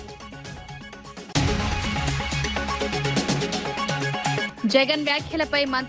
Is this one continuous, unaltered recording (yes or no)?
no